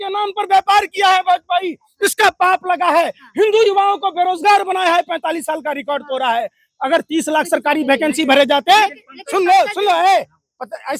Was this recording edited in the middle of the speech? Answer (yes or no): no